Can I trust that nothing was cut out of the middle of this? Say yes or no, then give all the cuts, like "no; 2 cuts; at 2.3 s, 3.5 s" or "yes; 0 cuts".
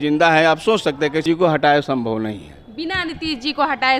no; 1 cut; at 1.2 s